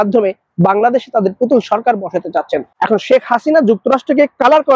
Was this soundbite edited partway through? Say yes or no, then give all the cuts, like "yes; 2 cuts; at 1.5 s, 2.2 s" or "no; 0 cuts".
yes; 1 cut; at 2.7 s